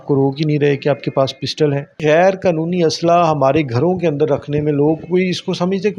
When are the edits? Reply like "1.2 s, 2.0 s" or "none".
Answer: 1.9 s

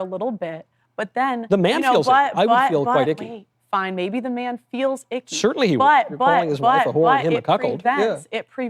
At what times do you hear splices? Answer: 3.6 s

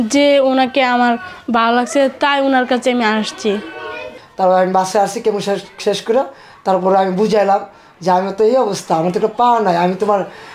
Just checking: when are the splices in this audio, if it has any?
4.2 s

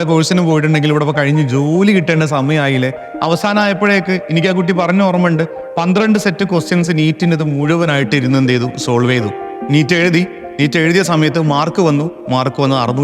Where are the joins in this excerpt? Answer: 3.1 s

